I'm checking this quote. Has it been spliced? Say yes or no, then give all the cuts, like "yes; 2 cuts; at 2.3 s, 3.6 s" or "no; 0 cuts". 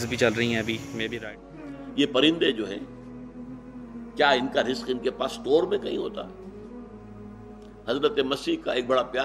yes; 1 cut; at 1.0 s